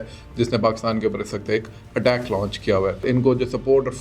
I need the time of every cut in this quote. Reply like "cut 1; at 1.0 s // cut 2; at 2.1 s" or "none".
cut 1; at 3.0 s